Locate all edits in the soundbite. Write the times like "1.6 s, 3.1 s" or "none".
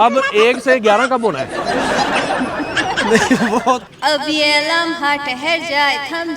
3.8 s

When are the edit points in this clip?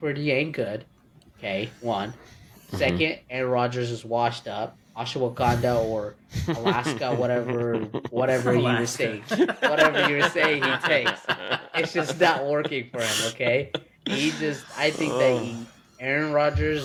none

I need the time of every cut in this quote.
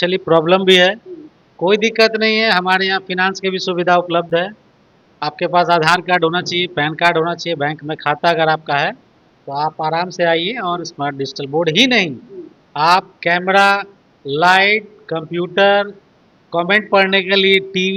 none

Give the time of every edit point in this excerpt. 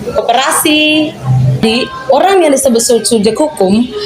1.6 s

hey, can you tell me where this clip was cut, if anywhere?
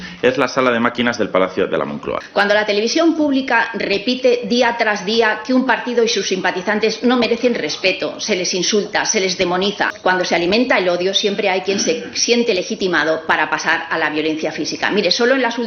2.0 s, 9.9 s

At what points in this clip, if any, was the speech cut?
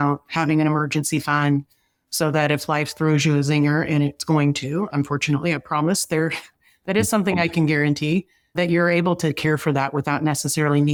none

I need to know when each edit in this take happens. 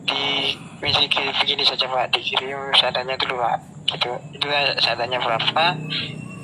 none

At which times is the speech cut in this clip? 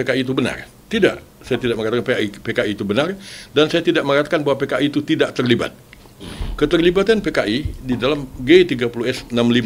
none

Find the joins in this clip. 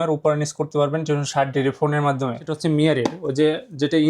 2.4 s

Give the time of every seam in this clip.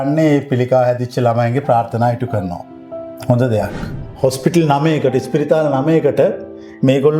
4.1 s

